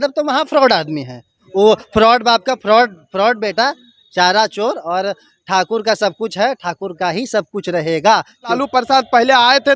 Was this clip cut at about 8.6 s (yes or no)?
yes